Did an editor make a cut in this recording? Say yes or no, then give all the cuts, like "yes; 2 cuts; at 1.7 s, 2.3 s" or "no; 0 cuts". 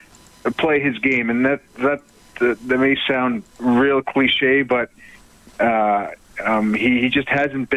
no; 0 cuts